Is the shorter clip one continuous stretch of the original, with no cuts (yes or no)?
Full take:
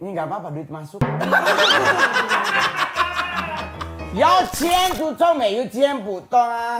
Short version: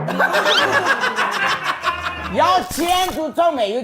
no